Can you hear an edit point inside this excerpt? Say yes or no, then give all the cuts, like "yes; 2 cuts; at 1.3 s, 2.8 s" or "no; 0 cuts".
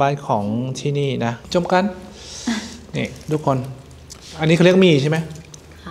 yes; 1 cut; at 1.4 s